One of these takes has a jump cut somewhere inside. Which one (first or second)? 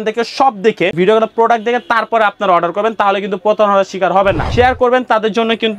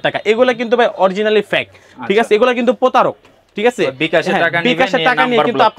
first